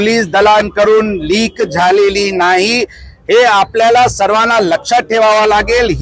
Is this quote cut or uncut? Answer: uncut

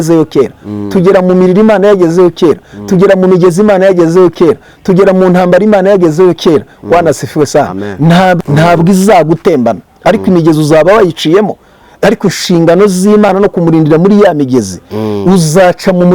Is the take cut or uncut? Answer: cut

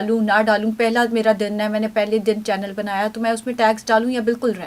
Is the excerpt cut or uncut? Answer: uncut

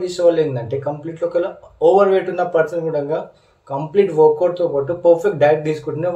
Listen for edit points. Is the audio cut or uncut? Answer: uncut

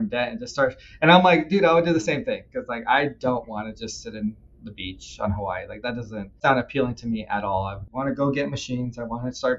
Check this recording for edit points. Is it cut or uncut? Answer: cut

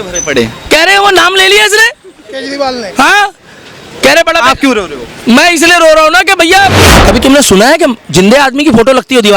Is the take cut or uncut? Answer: cut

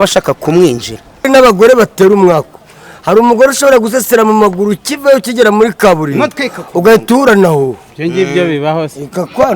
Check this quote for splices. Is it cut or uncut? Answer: cut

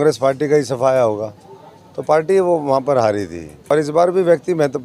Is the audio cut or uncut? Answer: cut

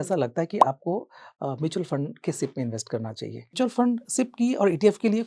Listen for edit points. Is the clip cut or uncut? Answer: cut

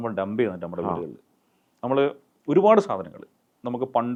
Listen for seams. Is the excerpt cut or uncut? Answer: uncut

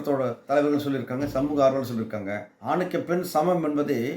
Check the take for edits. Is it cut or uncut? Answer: cut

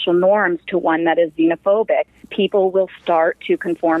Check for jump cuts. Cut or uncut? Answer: uncut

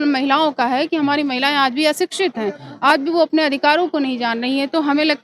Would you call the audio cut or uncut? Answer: uncut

